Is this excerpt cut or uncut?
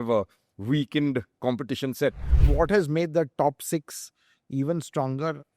cut